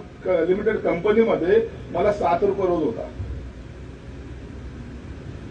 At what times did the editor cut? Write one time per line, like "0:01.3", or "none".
none